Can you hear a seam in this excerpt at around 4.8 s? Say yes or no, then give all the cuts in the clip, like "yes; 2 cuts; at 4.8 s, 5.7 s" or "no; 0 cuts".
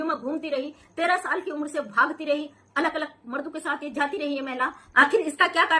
yes; 1 cut; at 4.8 s